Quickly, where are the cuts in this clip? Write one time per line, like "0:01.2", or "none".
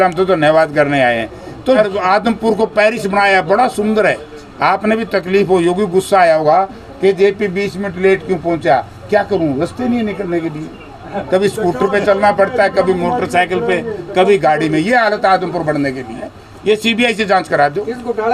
0:01.8
0:16.4